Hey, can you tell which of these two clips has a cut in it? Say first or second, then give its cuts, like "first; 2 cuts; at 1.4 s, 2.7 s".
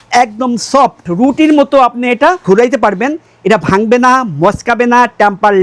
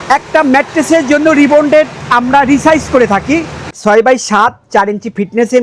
second; 1 cut; at 3.7 s